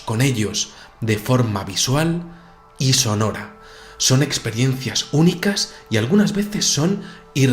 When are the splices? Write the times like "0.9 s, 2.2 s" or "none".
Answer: 5.7 s